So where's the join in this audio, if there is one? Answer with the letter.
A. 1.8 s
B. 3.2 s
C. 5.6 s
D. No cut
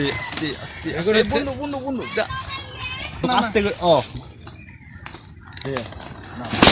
B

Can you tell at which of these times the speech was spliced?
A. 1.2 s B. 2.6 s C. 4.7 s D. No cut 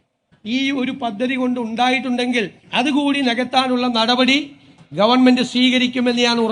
B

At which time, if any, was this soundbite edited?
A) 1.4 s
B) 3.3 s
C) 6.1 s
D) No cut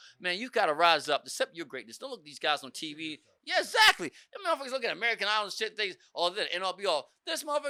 D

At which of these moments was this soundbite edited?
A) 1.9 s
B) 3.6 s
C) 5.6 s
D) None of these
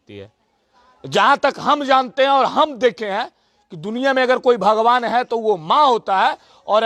D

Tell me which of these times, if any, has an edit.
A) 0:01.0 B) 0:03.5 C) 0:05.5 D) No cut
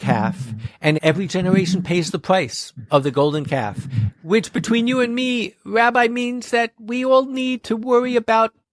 A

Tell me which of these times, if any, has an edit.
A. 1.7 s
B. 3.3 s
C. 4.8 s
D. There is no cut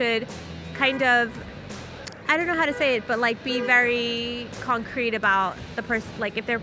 D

